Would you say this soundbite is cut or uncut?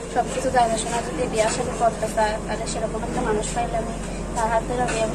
uncut